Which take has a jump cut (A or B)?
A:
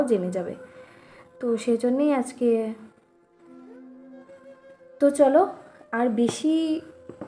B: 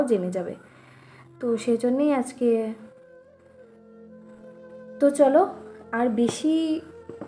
A